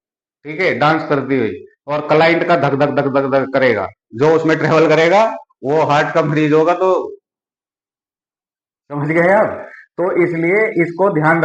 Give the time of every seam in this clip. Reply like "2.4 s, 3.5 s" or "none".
none